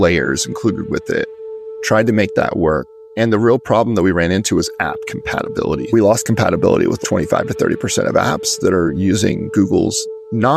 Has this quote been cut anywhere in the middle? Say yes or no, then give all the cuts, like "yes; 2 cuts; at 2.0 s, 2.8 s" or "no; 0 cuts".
no; 0 cuts